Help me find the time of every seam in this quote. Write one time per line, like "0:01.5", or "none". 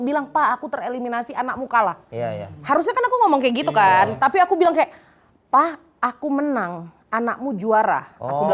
none